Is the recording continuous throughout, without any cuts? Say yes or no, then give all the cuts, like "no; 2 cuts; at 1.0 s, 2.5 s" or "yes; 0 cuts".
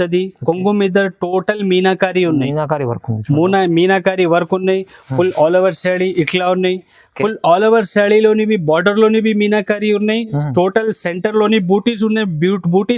yes; 0 cuts